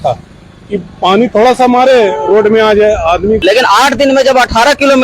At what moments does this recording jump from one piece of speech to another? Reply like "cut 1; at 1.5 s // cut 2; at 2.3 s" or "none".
cut 1; at 3.4 s